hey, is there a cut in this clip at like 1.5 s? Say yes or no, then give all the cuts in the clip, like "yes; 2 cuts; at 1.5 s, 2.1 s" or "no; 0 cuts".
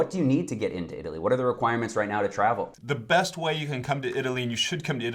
no; 1 cut; at 2.7 s